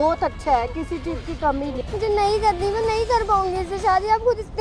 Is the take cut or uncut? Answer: cut